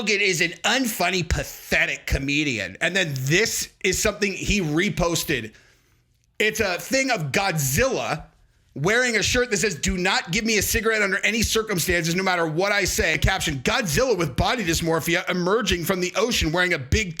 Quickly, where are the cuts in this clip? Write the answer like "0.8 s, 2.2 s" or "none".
13.2 s